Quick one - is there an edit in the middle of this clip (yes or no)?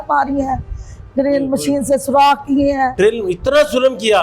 no